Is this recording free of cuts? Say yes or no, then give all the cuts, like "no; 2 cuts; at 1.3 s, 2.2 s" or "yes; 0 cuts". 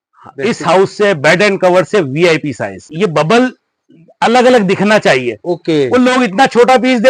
no; 1 cut; at 2.9 s